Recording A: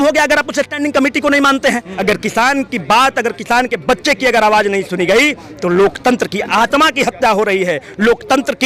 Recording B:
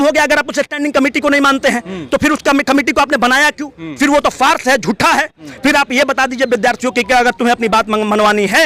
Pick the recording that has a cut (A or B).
A